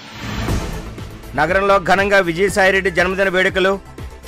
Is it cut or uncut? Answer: cut